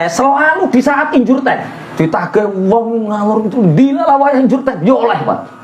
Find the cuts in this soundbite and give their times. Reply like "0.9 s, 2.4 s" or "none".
1.8 s

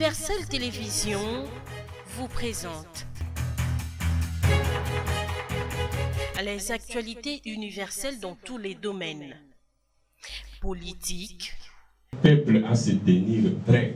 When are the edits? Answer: none

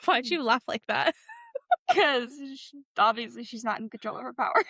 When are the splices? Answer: none

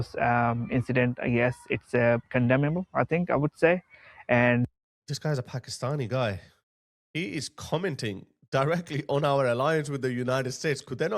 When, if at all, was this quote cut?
none

